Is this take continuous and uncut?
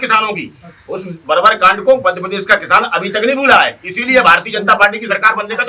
yes; 0 cuts

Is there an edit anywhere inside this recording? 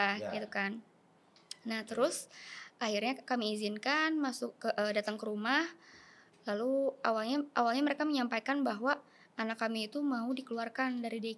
no; 0 cuts

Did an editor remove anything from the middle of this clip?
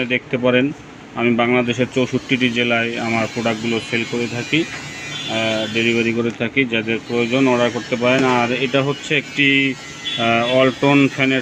no; 0 cuts

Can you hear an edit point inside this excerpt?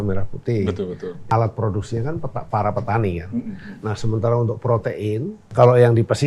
yes; 2 cuts; at 1.2 s, 5.5 s

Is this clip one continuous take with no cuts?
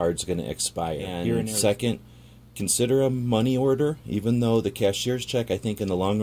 no; 1 cut; at 1.4 s

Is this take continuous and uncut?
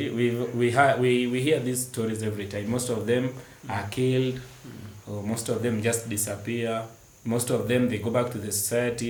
yes; 0 cuts

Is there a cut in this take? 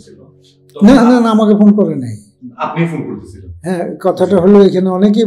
no; 0 cuts

